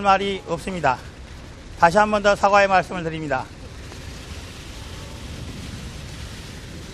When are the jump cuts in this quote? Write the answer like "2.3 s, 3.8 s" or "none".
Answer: 5.9 s